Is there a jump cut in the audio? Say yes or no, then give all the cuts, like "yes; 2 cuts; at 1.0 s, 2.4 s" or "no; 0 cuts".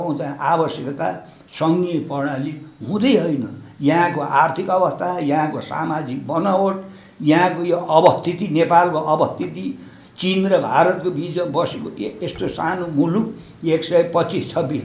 no; 0 cuts